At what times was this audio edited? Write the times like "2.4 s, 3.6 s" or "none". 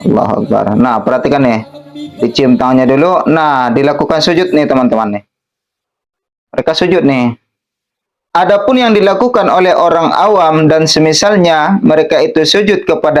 8.2 s